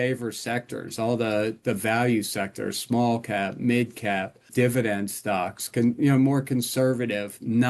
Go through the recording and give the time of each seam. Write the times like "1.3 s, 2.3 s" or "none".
4.5 s